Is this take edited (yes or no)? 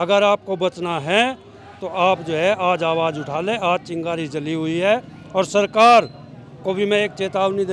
no